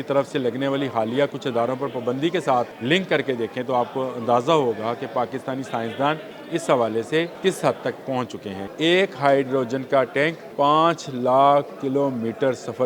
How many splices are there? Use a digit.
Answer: 5